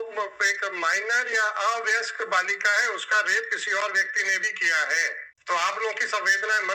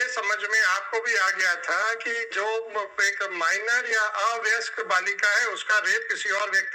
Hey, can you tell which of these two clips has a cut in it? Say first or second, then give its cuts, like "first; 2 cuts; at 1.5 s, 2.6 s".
first; 1 cut; at 5.3 s